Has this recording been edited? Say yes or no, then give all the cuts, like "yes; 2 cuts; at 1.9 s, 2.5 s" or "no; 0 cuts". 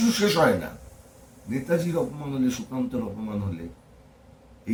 no; 0 cuts